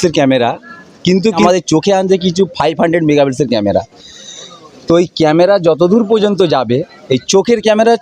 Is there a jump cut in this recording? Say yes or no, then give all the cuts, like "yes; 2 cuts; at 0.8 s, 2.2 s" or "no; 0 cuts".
yes; 1 cut; at 1.4 s